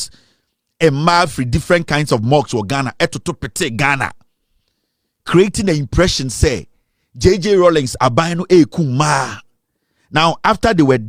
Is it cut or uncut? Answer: uncut